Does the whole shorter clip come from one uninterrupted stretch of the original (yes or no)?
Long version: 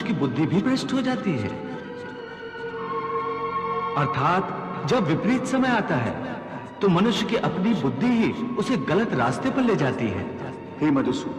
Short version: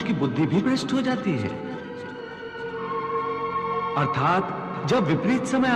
yes